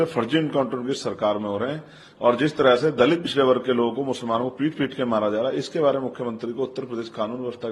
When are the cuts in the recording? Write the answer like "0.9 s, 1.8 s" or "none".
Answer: none